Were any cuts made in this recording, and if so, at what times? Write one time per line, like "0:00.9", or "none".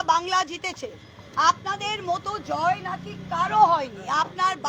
none